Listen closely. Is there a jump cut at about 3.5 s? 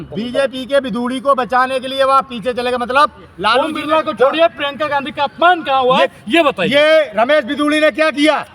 yes; 1 cut; at 3.5 s

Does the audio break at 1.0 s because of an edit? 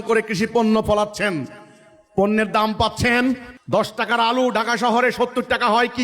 no; 1 cut; at 3.5 s

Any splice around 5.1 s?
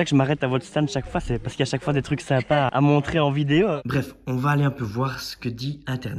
no; 2 cuts; at 2.7 s, 3.8 s

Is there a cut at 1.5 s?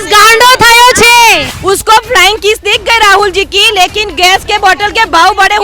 yes; 1 cut; at 1.5 s

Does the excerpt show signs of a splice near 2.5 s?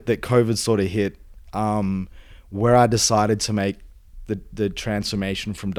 no; 0 cuts

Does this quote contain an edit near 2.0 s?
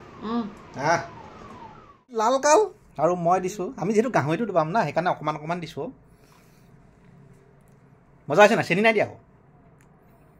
yes; 1 cut; at 2.0 s

